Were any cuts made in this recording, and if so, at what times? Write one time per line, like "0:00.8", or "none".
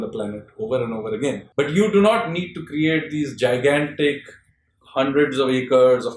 0:01.4